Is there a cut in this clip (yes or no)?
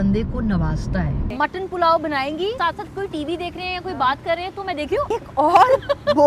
yes